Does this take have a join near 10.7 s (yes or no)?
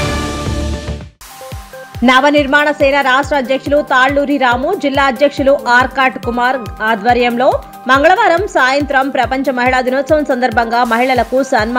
no